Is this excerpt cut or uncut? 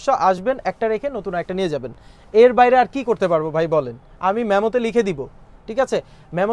uncut